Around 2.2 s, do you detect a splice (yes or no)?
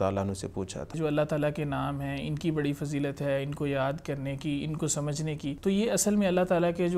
no